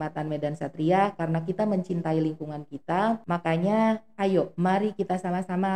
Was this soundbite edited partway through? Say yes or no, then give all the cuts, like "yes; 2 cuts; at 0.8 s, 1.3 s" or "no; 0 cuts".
yes; 2 cuts; at 3.2 s, 4.5 s